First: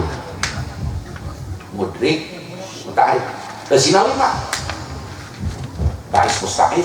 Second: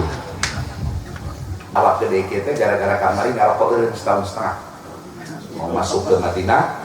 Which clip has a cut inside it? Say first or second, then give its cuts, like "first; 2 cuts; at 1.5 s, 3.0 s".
second; 1 cut; at 1.8 s